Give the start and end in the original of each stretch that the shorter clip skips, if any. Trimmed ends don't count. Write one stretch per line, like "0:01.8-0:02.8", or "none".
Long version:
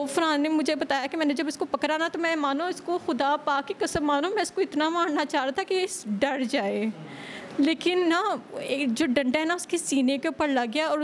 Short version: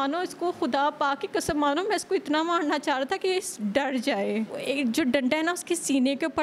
0:07.0-0:08.6